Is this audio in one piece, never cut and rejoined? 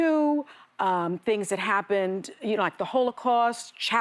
yes; 0 cuts

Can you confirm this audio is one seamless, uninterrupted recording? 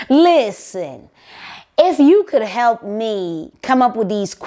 yes; 0 cuts

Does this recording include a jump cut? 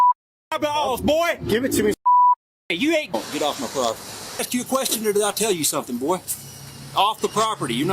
yes; 2 cuts; at 3.1 s, 4.4 s

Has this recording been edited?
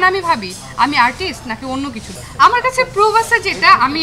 yes; 1 cut; at 2.0 s

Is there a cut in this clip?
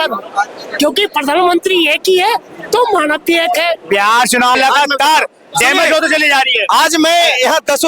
yes; 1 cut; at 4.5 s

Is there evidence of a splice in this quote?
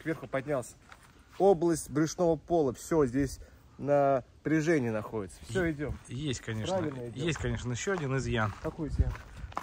no; 0 cuts

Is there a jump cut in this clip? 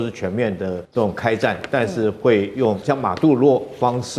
yes; 2 cuts; at 0.8 s, 2.8 s

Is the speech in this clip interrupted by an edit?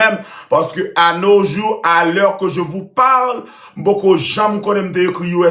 no; 0 cuts

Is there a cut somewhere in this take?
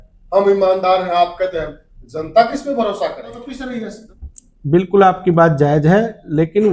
no; 0 cuts

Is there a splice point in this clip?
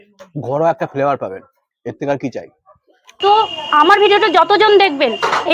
yes; 1 cut; at 3.2 s

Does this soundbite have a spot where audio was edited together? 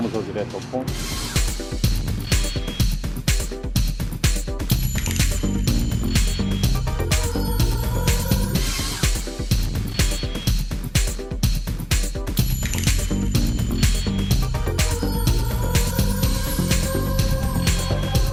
no; 0 cuts

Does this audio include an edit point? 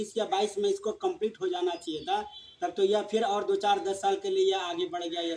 no; 0 cuts

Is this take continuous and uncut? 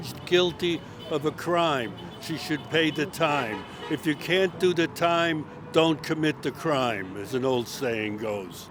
yes; 0 cuts

